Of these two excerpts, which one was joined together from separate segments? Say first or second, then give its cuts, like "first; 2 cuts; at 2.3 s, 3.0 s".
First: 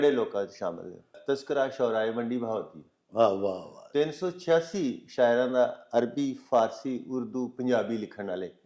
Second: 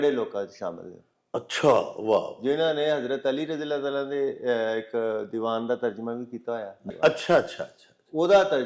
first; 1 cut; at 1.2 s